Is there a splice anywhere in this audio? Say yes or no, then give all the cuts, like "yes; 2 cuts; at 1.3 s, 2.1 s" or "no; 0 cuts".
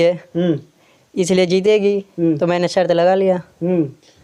no; 0 cuts